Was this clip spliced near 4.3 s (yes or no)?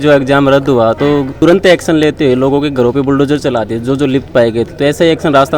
no